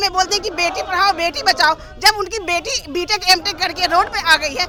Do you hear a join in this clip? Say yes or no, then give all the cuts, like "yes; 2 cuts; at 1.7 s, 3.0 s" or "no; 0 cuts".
no; 0 cuts